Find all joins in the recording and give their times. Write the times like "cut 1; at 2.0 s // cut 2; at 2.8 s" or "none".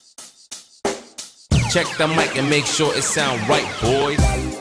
none